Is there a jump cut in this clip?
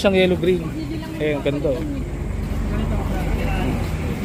no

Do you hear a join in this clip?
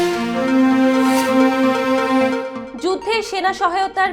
yes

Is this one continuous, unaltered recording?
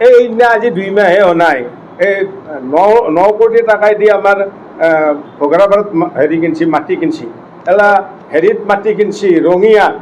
yes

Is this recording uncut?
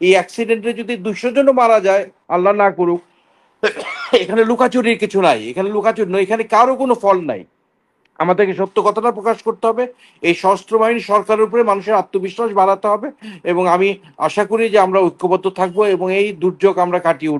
yes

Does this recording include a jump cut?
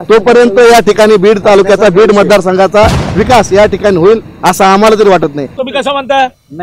yes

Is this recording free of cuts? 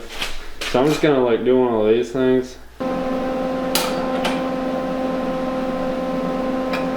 no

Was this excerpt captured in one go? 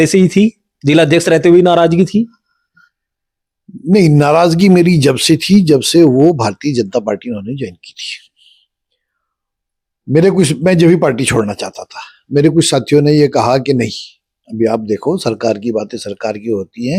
yes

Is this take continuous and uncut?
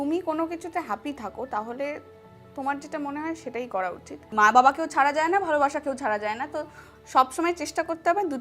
yes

